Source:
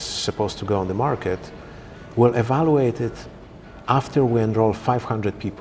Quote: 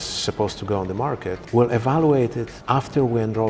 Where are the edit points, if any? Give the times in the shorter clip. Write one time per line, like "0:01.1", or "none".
0:01.4
0:02.5